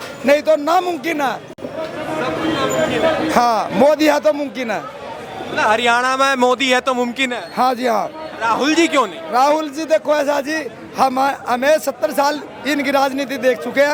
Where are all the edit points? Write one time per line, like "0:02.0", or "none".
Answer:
none